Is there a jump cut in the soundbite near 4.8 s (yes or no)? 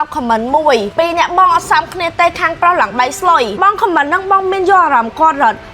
no